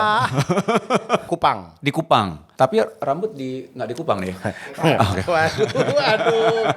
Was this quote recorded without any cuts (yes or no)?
no